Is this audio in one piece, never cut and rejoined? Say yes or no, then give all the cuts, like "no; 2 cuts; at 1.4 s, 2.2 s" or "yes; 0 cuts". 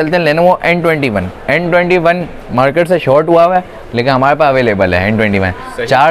yes; 0 cuts